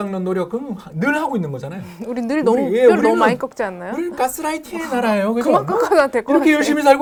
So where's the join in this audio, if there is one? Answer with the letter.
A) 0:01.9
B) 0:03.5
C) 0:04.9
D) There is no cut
D